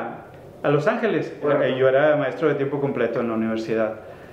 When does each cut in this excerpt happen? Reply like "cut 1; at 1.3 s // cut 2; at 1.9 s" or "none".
cut 1; at 1.5 s

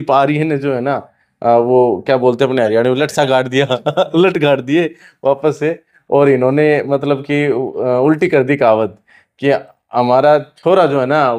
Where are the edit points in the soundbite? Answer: none

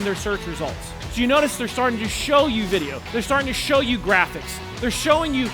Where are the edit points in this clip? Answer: cut 1; at 3.0 s

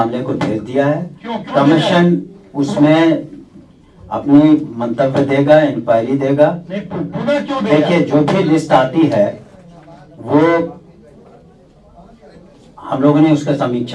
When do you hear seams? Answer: none

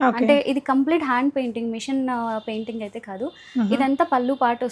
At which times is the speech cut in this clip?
none

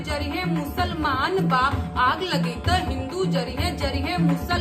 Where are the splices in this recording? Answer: none

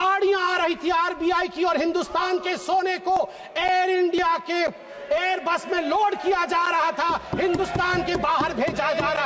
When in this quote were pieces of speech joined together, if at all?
none

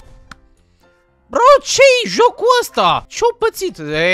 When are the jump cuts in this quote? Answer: cut 1; at 3.1 s

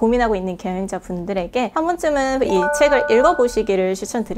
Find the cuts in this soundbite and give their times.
cut 1; at 1.7 s

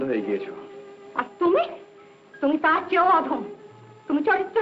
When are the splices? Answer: none

